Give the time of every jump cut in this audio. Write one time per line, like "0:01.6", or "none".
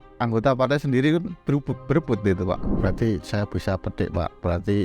0:02.8